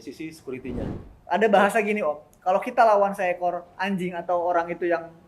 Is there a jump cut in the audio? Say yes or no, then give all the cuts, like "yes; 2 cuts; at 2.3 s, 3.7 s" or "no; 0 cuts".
yes; 1 cut; at 1.0 s